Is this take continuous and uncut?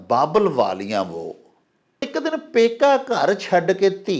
no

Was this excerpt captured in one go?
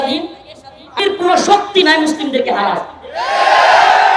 no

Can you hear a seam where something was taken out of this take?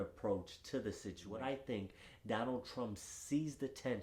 yes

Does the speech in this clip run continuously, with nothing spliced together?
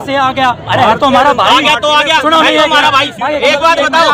yes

